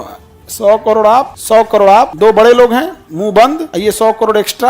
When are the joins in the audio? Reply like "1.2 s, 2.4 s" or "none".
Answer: 1.4 s, 2.1 s, 3.7 s